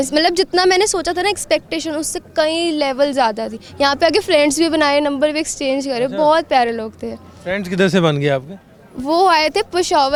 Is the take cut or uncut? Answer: uncut